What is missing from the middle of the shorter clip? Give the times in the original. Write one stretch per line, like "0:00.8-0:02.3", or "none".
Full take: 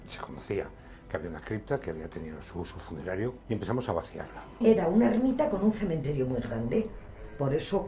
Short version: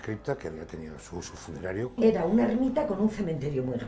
0:03.3-0:04.5